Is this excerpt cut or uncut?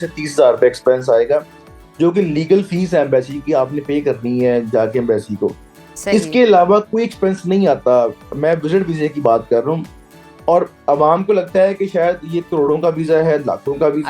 uncut